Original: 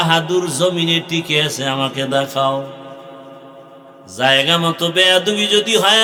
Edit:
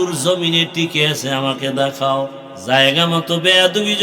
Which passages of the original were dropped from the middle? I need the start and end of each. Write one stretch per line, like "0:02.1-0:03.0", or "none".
0:02.8-0:04.0